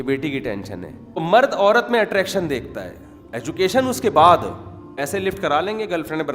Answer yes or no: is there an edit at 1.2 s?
yes